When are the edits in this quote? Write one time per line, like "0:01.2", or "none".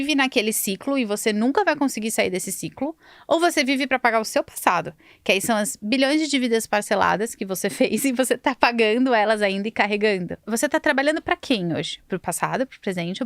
0:10.5
0:12.2